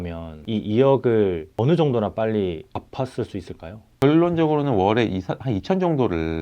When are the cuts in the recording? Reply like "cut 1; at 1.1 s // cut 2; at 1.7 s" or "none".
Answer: cut 1; at 1.5 s // cut 2; at 2.7 s // cut 3; at 3.9 s